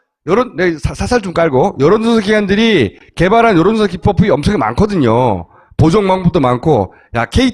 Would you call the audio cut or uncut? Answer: cut